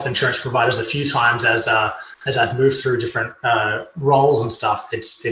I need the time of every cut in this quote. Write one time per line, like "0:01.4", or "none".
none